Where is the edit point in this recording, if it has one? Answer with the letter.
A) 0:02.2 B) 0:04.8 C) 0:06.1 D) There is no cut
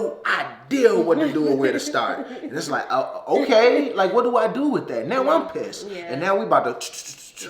D